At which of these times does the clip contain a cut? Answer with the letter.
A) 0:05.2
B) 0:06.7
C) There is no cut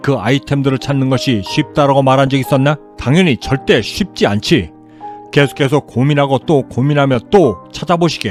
C